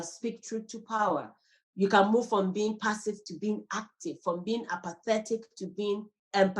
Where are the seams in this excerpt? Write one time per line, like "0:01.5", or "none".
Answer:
0:01.4